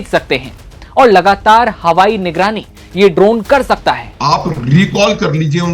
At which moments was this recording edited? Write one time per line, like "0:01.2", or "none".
0:04.1

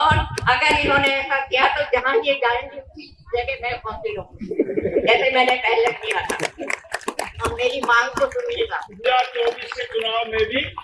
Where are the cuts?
0:09.0

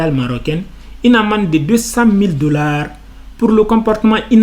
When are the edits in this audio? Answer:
none

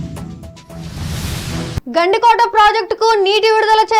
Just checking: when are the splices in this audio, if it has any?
none

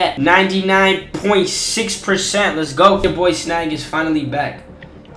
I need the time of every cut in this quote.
0:03.0

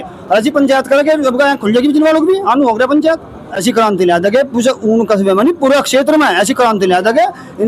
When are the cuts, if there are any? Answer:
0:03.5

